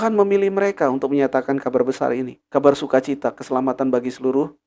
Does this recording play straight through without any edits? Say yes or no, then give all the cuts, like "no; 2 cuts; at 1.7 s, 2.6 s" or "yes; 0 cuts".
no; 1 cut; at 2.4 s